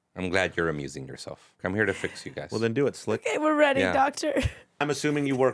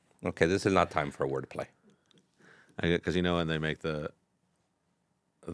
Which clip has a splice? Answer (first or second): first